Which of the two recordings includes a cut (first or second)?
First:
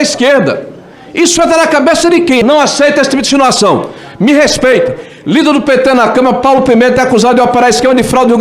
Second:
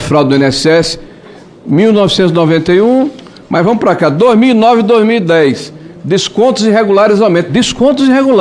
first